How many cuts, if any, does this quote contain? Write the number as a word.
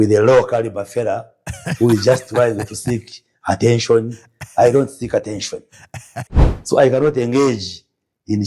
one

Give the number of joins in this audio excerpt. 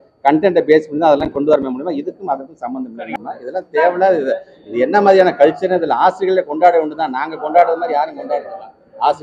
one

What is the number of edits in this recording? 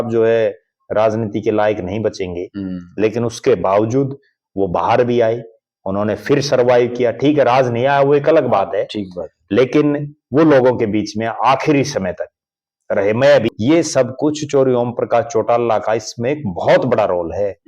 one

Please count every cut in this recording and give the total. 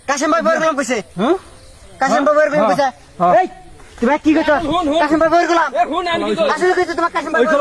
zero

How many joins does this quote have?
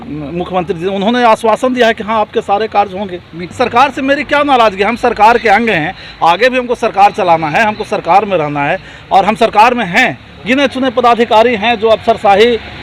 two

